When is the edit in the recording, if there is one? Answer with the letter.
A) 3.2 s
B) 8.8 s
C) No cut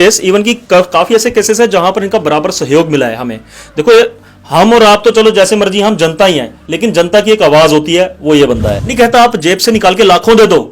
B